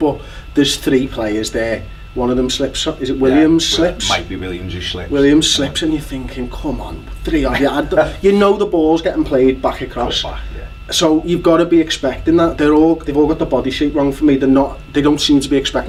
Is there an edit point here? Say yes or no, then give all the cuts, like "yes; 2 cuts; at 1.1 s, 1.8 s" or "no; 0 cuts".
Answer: no; 0 cuts